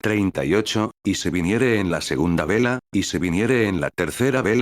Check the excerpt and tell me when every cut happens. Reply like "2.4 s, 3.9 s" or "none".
2.8 s